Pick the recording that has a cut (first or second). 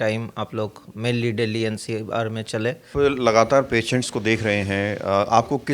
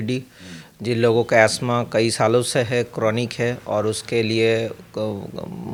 first